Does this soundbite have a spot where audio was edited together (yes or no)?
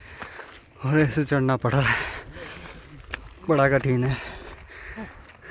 no